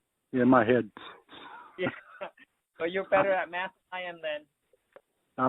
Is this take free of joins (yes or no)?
yes